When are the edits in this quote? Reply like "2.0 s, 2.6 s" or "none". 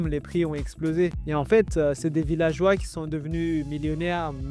1.1 s